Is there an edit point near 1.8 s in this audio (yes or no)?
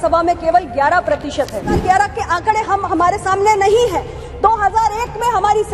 yes